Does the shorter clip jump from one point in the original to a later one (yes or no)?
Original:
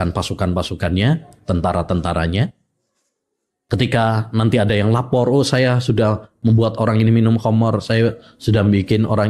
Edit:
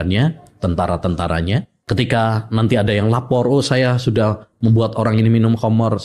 yes